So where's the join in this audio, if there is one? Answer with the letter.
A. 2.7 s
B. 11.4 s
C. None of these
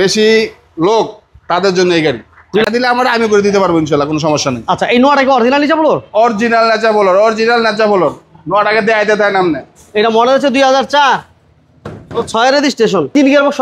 A